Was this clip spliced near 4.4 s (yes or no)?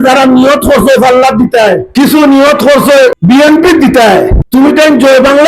yes